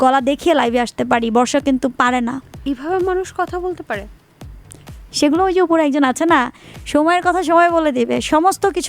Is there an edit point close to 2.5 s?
no; 0 cuts

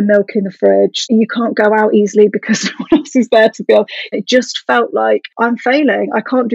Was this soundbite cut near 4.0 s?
yes; 2 cuts; at 1.1 s, 4.0 s

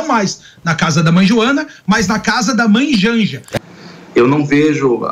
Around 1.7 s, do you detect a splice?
no; 1 cut; at 3.5 s

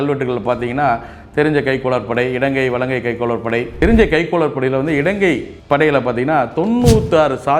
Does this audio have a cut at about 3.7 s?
yes; 1 cut; at 3.7 s

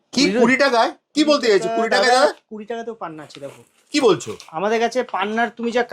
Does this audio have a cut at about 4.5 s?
no; 0 cuts

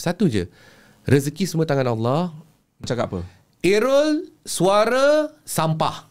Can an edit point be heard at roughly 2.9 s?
yes; 1 cut; at 2.9 s

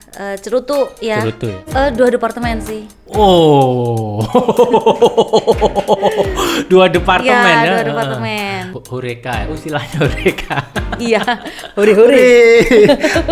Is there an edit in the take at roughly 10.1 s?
no; 2 cuts; at 1.6 s, 8.7 s

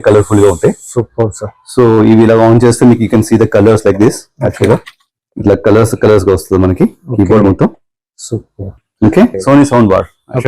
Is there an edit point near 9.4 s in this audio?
yes; 1 cut; at 9.4 s

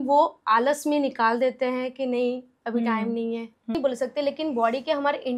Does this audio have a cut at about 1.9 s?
no; 1 cut; at 3.8 s

